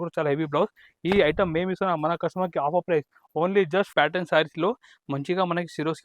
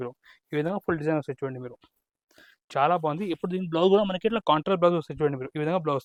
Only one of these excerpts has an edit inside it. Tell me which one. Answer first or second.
first